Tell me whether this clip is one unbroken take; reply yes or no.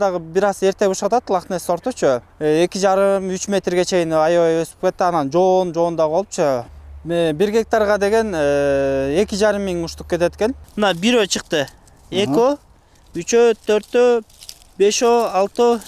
no